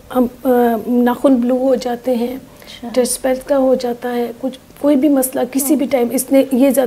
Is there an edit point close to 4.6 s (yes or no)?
no